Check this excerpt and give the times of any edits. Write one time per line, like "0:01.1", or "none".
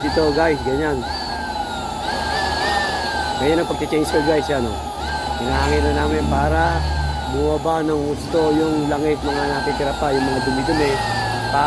none